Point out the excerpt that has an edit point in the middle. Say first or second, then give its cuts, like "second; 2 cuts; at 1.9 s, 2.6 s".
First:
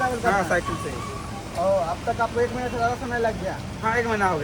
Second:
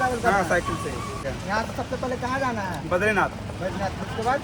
second; 1 cut; at 1.3 s